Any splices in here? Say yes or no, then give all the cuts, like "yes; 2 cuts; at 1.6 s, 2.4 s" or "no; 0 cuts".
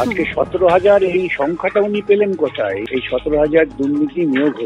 yes; 1 cut; at 2.8 s